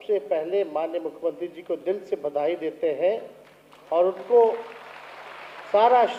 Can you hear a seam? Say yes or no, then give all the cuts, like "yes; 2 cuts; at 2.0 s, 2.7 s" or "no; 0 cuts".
no; 0 cuts